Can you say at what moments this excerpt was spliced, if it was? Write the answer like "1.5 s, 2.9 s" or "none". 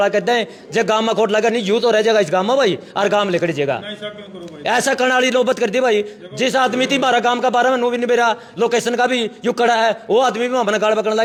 none